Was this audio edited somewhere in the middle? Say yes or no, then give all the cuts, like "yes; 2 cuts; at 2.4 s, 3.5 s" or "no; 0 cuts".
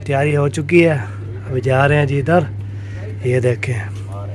no; 0 cuts